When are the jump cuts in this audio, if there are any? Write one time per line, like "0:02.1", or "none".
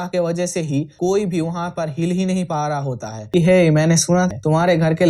0:03.3